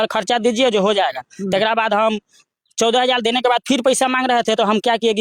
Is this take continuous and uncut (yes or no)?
yes